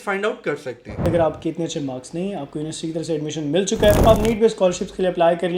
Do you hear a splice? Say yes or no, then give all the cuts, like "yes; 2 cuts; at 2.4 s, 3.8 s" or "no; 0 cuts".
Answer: yes; 2 cuts; at 1.0 s, 4.0 s